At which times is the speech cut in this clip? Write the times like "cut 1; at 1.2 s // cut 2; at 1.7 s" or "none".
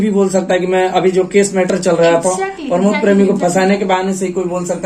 none